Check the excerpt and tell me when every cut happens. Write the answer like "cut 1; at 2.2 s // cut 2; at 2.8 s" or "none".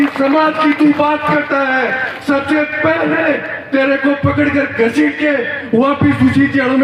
none